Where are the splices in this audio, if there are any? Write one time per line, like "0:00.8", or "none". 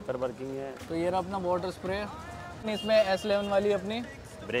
0:00.8
0:02.7